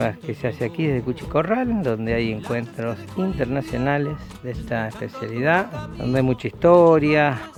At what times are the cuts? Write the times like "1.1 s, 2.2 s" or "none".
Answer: none

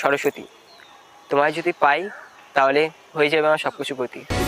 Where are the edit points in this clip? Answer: none

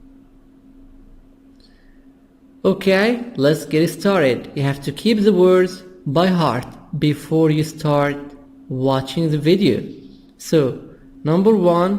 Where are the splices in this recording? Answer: 2.3 s

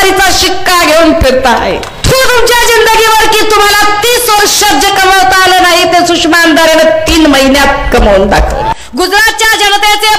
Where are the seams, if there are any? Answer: 1.9 s, 8.7 s

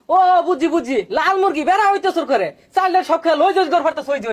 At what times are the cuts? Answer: none

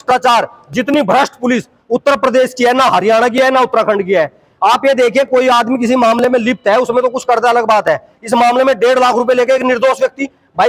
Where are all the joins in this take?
none

